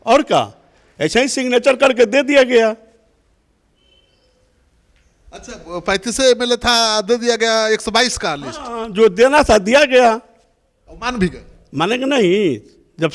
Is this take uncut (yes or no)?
yes